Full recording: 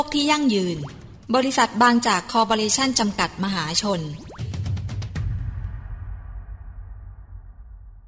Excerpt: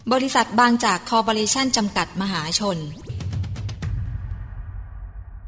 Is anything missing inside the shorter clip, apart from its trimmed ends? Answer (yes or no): yes